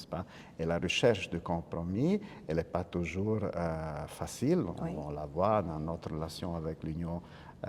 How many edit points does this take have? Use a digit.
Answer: 0